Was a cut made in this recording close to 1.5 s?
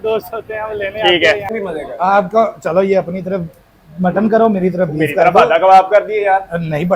yes; 1 cut; at 1.5 s

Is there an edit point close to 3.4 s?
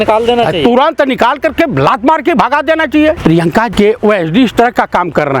yes; 1 cut; at 3.4 s

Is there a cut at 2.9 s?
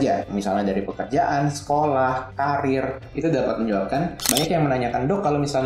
no; 1 cut; at 4.2 s

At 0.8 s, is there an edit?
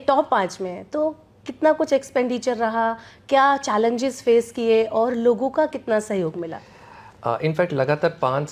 no; 0 cuts

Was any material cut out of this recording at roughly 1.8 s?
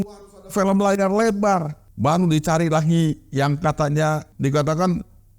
yes; 2 cuts; at 1.8 s, 4.3 s

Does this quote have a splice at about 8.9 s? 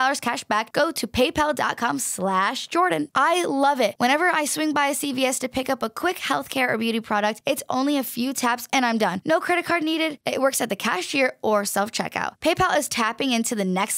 no; 1 cut; at 3.0 s

